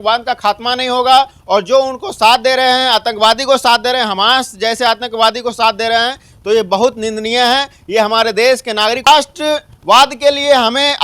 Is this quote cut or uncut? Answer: cut